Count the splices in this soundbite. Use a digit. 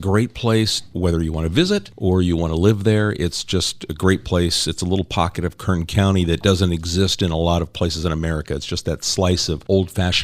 2